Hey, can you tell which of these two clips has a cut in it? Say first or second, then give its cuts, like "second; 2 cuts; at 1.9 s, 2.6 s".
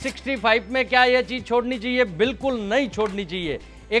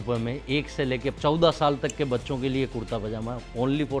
second; 1 cut; at 1.2 s